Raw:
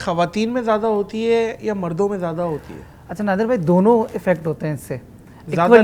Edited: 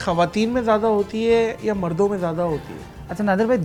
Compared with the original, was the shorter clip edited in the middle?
no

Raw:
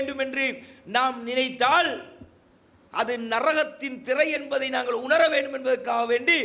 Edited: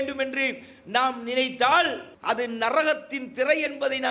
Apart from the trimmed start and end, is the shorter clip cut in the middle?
yes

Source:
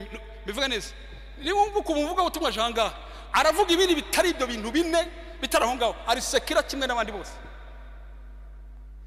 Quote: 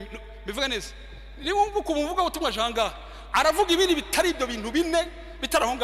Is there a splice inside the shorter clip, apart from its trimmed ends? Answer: no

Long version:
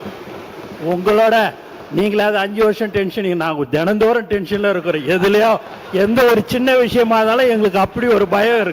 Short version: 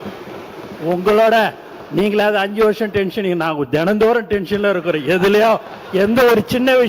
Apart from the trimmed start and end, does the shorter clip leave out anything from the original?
no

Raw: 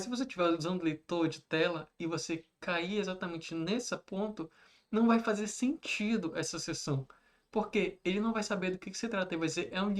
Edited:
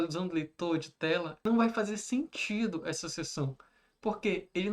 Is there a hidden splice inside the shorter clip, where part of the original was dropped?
yes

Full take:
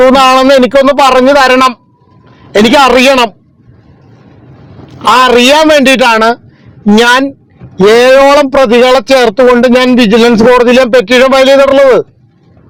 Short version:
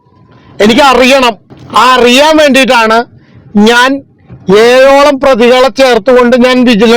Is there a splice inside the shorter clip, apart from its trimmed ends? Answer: yes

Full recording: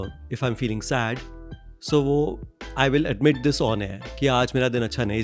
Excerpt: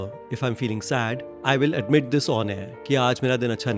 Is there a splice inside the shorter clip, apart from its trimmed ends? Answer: yes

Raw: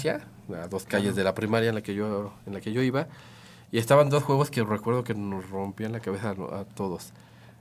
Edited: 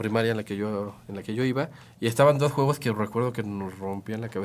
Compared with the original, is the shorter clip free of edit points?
no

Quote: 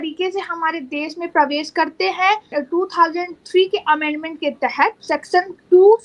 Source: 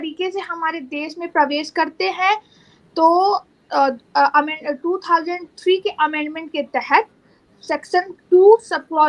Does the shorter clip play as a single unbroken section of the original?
no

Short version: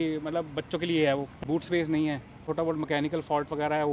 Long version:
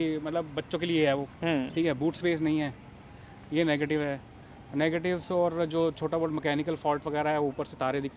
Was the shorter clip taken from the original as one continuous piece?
no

